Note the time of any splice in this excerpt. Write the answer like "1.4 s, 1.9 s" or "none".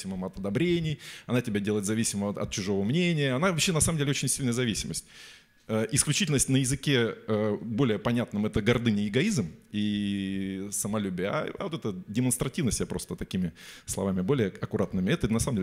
none